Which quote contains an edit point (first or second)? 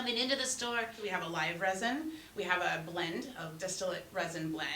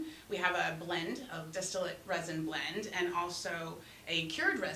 first